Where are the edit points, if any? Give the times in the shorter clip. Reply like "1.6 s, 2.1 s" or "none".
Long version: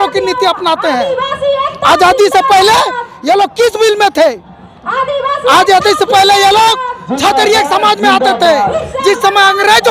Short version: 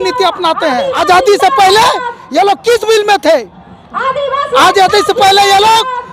1.0 s